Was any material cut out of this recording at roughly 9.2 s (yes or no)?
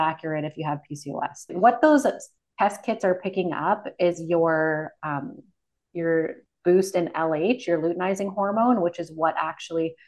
no